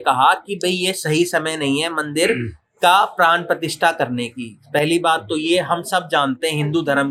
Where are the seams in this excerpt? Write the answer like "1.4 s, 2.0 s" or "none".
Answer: none